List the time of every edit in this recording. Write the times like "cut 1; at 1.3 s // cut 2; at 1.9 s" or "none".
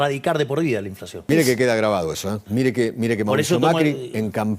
cut 1; at 1.3 s // cut 2; at 2.4 s